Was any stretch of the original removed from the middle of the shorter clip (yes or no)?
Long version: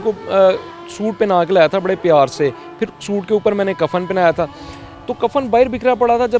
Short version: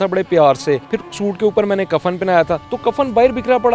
yes